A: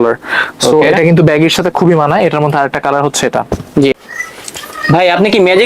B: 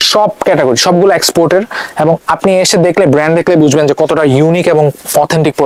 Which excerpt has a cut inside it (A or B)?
A